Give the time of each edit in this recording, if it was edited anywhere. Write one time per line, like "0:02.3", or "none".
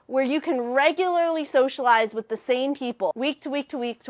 0:03.1